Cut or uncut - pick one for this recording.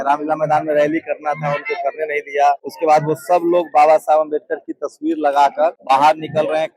cut